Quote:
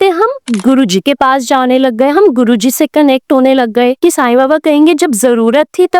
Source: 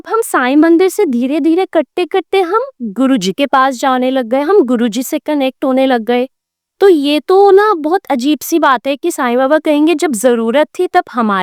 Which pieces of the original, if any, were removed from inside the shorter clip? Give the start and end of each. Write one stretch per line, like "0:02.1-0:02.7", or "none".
0:06.3-0:09.0